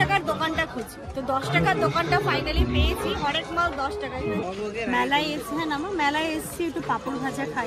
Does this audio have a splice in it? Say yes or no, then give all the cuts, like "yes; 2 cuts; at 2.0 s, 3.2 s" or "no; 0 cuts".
yes; 1 cut; at 4.4 s